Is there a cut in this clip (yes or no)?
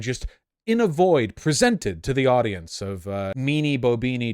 yes